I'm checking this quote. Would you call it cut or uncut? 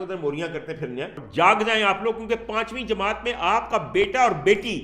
cut